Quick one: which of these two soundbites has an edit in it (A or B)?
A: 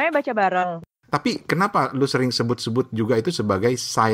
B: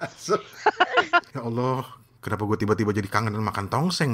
A